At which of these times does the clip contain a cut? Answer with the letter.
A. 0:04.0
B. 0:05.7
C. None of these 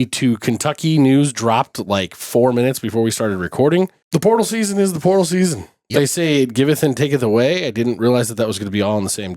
A